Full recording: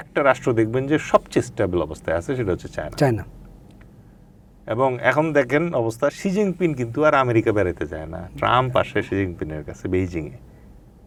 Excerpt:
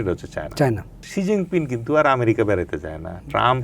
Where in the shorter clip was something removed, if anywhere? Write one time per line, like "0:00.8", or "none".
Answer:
0:01.1